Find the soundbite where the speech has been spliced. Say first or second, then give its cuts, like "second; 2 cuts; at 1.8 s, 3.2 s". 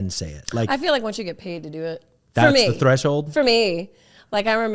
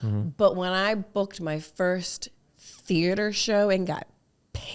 first; 1 cut; at 2.1 s